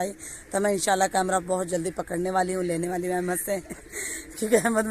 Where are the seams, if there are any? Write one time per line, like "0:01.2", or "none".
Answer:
none